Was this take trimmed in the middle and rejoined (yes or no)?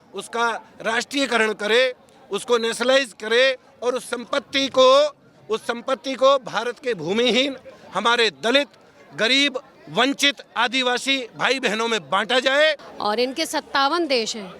yes